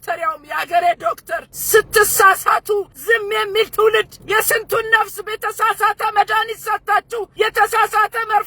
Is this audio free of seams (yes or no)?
no